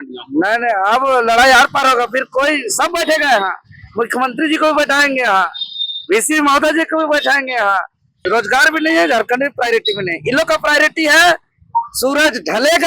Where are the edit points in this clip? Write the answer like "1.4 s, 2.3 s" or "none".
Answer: 8.1 s